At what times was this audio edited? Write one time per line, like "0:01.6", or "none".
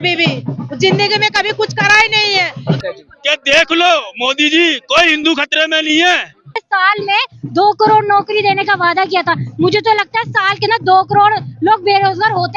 0:02.8
0:06.6